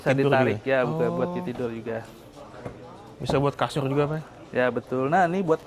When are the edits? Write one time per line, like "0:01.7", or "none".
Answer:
none

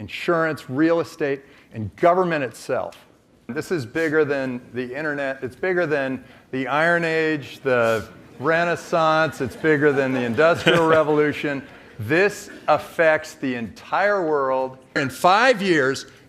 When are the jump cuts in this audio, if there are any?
0:03.5
0:15.0

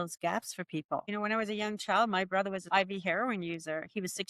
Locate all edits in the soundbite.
0:01.1
0:02.7

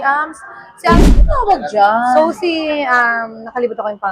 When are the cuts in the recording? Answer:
0:01.0

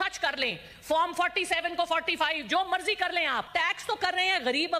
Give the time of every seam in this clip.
0:03.5

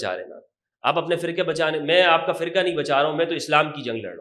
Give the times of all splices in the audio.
none

